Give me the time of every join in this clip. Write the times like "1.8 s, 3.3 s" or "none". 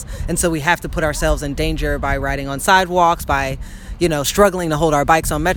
none